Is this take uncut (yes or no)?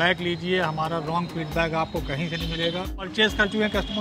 no